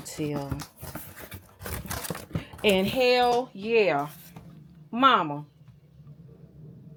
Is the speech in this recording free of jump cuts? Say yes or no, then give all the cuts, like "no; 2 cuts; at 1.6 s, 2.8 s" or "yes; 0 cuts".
yes; 0 cuts